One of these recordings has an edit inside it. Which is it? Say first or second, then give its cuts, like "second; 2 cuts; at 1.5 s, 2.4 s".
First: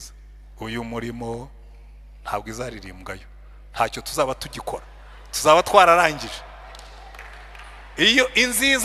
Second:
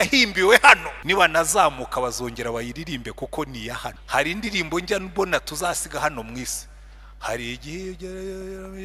second; 2 cuts; at 0.9 s, 4.0 s